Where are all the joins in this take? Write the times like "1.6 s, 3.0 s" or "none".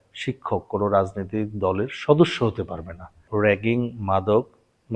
3.2 s